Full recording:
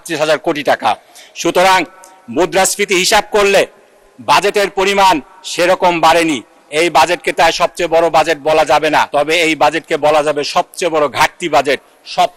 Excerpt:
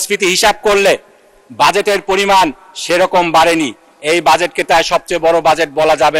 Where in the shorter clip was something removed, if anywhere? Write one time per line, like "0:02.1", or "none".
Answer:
none